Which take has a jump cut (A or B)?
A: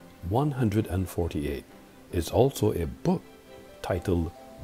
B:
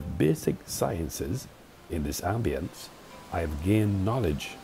A